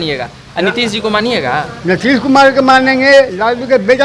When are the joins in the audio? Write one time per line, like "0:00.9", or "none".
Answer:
none